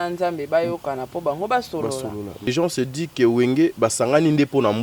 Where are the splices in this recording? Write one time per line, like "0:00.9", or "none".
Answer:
0:02.5